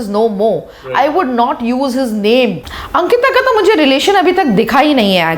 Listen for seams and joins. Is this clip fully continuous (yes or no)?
no